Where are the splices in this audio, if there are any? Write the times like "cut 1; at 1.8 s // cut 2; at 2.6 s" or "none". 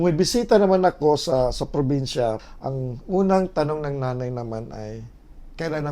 cut 1; at 2.4 s